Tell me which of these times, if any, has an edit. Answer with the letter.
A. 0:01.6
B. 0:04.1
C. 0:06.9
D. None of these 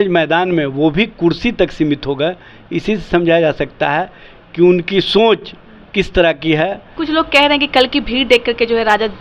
C